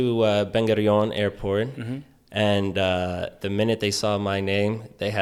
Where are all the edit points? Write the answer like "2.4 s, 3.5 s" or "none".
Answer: none